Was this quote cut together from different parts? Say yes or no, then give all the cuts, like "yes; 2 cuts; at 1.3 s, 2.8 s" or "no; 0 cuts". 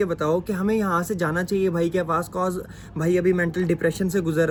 no; 0 cuts